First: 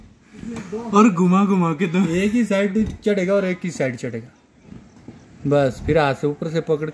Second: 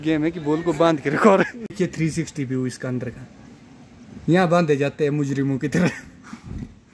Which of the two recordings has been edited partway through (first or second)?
second